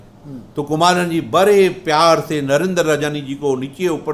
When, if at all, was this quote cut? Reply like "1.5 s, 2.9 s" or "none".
none

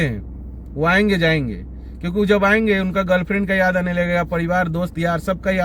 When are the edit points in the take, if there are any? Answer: none

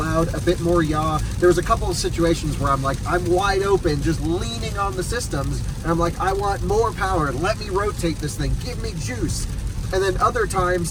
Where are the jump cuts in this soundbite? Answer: none

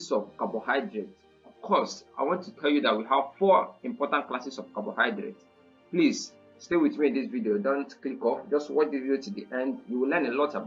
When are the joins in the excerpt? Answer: none

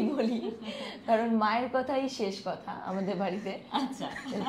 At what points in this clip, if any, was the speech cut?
none

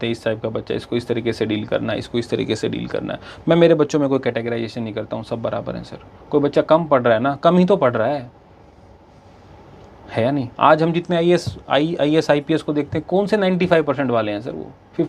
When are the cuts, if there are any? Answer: none

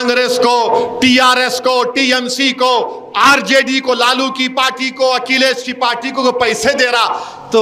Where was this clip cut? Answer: none

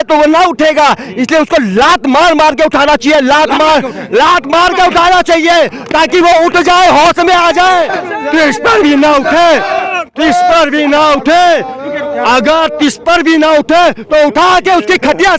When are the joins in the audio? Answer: 8.0 s

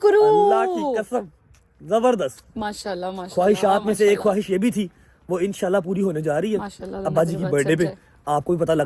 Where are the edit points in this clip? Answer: none

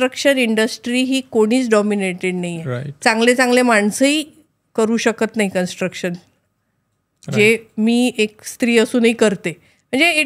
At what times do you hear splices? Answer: none

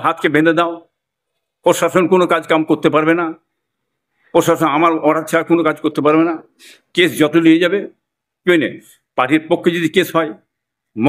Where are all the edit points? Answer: none

